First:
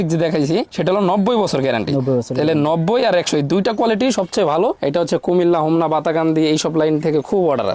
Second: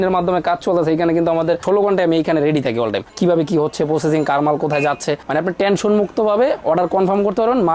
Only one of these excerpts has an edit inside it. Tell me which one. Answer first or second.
first